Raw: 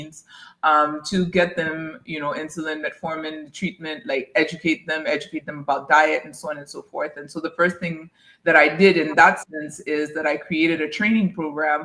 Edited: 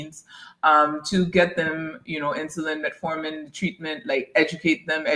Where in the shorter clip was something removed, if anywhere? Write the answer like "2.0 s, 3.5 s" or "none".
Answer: none